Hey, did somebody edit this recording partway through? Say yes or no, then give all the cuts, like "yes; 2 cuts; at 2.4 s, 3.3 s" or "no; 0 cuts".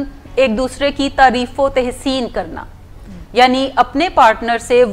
no; 0 cuts